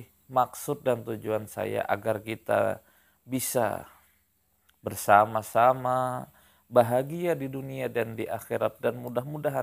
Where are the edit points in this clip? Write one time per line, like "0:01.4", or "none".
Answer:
none